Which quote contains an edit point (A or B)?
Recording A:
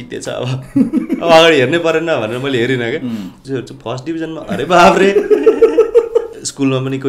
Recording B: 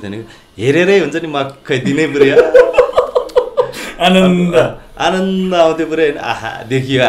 A